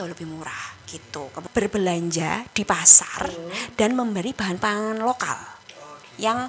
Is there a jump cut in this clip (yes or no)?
yes